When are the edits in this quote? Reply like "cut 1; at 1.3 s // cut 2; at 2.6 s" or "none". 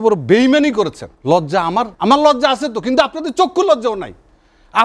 cut 1; at 1.1 s // cut 2; at 1.9 s